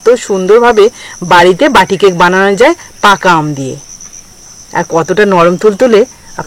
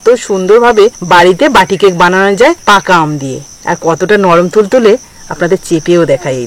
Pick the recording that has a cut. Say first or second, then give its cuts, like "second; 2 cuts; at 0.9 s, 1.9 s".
second; 3 cuts; at 1.0 s, 2.6 s, 3.5 s